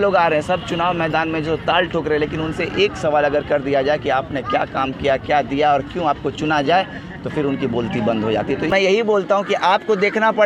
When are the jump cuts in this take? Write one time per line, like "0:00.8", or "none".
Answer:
0:08.7